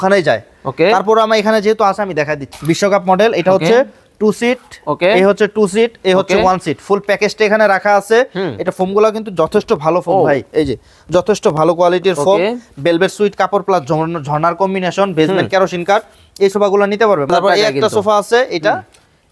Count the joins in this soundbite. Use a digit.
2